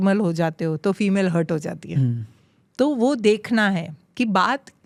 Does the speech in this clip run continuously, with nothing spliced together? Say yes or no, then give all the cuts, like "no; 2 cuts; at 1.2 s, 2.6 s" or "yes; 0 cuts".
yes; 0 cuts